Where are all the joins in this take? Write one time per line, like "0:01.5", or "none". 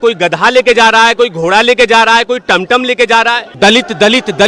0:03.5